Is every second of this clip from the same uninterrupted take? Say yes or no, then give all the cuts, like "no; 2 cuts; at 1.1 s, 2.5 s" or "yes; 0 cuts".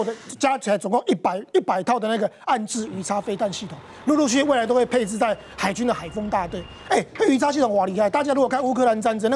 yes; 0 cuts